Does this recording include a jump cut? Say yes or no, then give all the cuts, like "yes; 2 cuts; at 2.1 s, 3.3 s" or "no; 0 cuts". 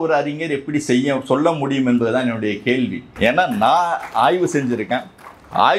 yes; 1 cut; at 3.0 s